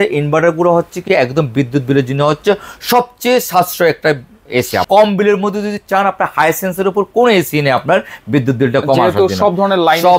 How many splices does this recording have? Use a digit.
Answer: 1